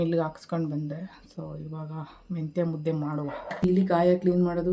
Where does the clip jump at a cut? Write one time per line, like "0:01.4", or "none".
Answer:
0:03.6